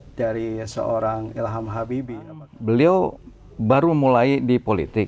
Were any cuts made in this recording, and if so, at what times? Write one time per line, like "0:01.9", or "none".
0:02.4